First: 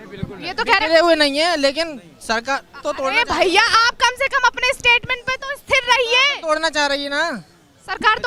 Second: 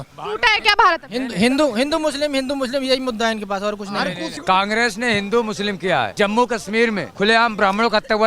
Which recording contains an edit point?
second; 3 cuts; at 4.4 s, 6.1 s, 7.1 s

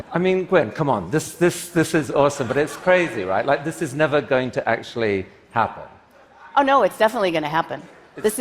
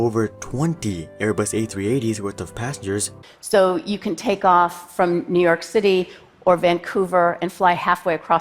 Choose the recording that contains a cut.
second; 1 cut; at 3.2 s

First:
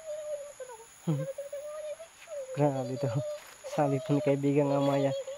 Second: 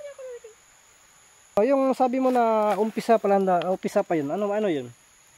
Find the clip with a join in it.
second; 1 cut; at 1.6 s

